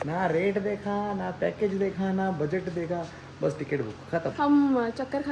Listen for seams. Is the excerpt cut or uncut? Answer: cut